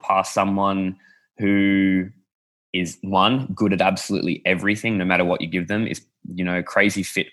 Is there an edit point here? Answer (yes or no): no